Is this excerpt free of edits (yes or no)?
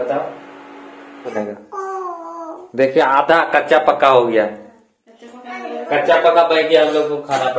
no